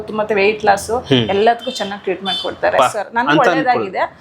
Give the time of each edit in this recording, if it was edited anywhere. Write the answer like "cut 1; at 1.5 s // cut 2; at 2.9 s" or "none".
cut 1; at 2.8 s